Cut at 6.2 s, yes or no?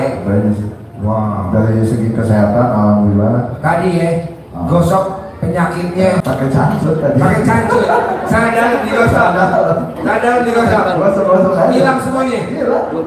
yes